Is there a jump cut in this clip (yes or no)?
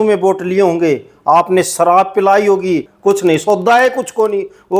yes